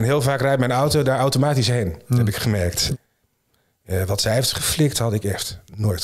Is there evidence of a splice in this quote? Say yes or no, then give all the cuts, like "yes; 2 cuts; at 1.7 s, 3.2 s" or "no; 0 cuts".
yes; 1 cut; at 2.9 s